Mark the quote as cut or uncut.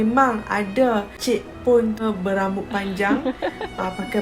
cut